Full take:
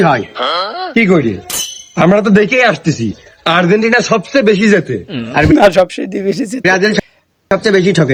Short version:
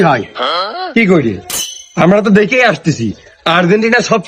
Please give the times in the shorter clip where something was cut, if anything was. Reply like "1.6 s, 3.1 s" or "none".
none